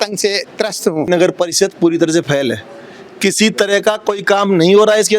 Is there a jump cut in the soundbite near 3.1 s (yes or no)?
no